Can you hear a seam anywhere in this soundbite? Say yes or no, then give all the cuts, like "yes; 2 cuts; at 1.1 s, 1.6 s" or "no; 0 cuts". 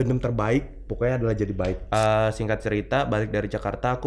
yes; 1 cut; at 1.8 s